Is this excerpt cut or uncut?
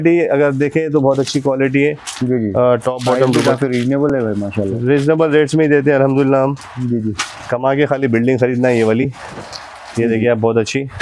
uncut